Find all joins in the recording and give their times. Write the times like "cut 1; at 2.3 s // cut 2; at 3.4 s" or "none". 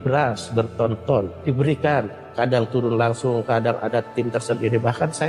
cut 1; at 1.3 s